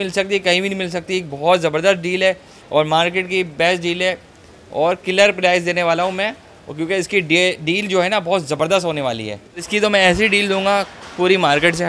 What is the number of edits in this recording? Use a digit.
1